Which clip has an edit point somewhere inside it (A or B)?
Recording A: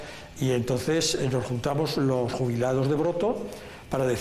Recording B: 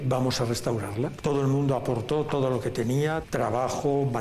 B